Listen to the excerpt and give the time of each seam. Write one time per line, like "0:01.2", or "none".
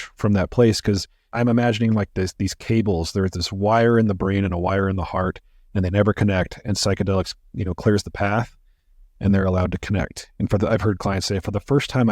0:01.3